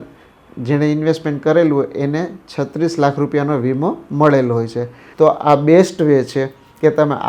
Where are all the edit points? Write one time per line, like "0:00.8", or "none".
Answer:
0:05.0